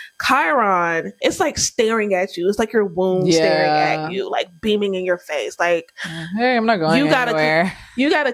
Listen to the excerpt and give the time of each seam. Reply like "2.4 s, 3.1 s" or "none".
1.2 s